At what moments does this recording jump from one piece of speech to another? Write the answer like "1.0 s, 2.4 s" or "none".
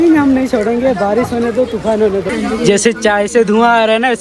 2.3 s